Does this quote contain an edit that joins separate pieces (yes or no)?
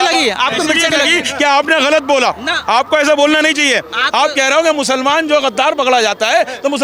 no